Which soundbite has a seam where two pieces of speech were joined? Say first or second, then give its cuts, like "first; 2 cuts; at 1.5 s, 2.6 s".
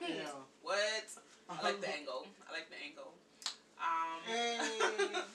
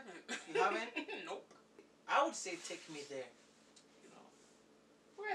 second; 1 cut; at 1.9 s